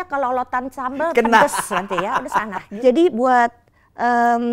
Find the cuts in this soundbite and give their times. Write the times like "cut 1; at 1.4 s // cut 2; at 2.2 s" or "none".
cut 1; at 2.6 s